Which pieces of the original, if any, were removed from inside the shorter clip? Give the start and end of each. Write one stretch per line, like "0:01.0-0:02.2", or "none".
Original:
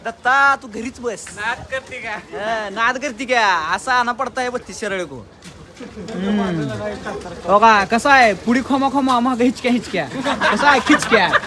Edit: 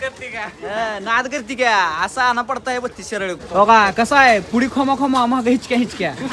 0:05.1-0:07.3